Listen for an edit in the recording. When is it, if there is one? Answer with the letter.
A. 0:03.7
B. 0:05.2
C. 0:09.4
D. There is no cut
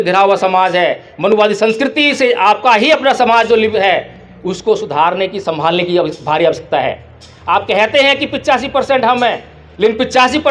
A